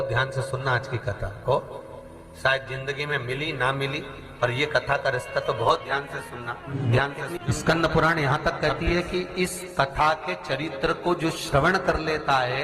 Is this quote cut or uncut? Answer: cut